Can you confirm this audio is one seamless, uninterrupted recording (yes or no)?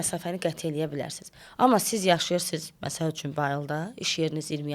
yes